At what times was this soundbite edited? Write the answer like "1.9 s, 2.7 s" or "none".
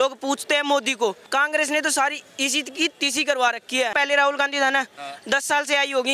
1.2 s, 3.9 s